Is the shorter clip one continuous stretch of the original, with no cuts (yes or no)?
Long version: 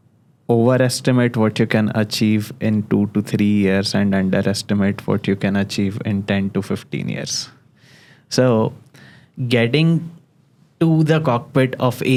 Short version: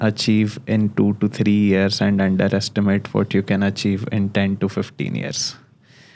yes